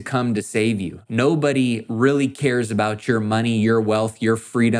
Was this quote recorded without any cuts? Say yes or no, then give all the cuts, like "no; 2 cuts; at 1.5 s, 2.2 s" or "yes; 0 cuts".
no; 1 cut; at 1.0 s